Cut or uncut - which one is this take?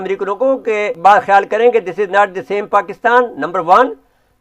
cut